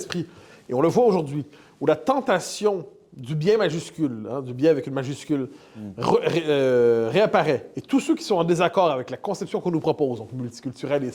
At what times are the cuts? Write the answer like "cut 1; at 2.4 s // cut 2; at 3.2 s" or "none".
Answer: none